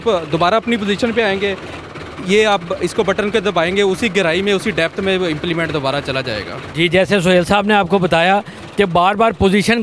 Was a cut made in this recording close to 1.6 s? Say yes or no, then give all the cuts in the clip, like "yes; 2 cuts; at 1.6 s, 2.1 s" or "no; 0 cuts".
no; 0 cuts